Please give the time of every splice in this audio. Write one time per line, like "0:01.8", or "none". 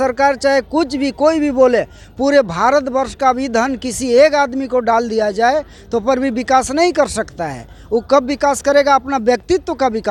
none

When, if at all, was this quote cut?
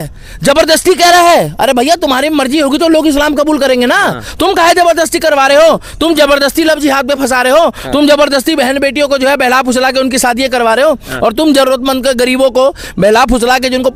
none

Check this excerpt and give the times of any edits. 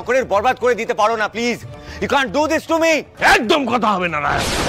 none

